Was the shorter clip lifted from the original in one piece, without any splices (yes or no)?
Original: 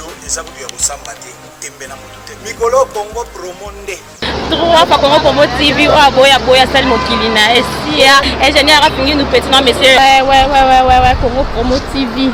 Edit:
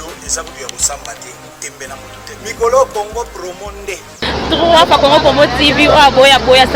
yes